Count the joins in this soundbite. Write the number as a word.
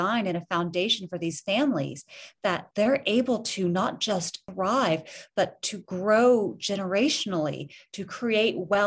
two